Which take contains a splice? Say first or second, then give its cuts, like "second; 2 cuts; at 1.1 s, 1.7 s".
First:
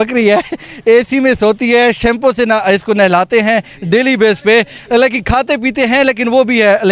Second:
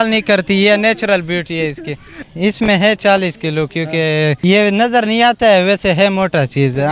second; 2 cuts; at 2.1 s, 4.4 s